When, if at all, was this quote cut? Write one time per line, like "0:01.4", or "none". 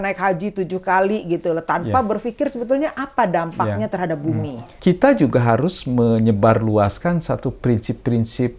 0:04.7